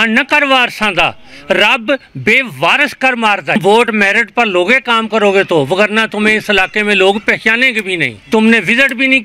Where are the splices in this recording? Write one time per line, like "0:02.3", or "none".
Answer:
0:03.6
0:08.1

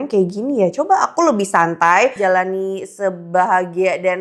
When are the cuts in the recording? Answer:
0:02.2

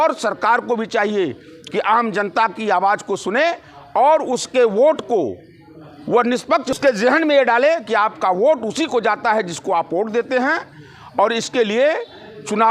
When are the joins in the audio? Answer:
0:06.7

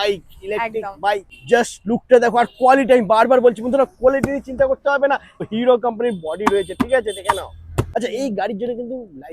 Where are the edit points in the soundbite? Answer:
0:01.3
0:05.5
0:07.9

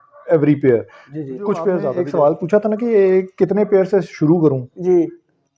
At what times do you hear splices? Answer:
0:02.0

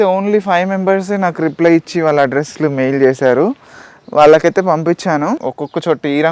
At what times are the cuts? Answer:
0:05.4

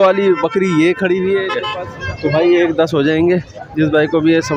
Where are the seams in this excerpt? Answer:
0:01.6

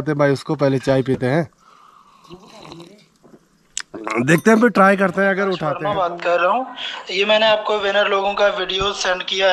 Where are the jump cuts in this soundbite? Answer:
0:05.7

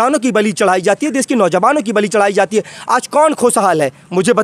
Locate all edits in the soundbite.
none

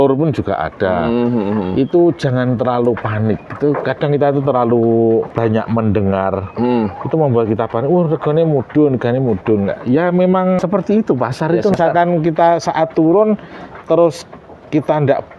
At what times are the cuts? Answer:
0:05.3
0:10.6
0:11.8

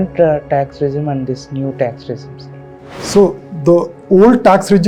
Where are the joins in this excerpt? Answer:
none

